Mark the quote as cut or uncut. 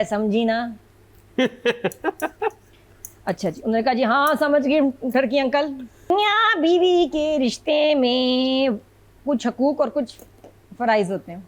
cut